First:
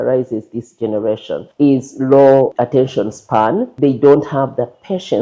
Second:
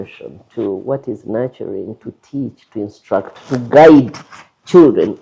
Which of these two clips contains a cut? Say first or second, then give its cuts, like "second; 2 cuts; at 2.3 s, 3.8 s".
first; 3 cuts; at 1.5 s, 2.5 s, 3.7 s